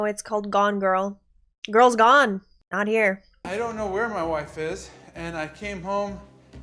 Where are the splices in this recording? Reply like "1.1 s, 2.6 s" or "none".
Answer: none